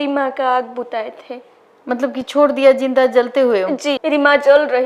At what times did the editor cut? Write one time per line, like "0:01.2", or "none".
none